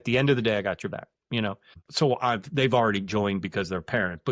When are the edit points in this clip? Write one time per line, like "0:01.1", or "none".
0:01.8